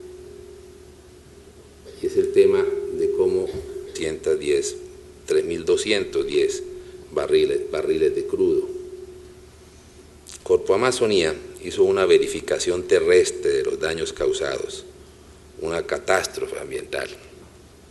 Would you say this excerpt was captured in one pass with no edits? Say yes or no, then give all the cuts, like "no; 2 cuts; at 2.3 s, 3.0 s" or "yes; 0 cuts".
yes; 0 cuts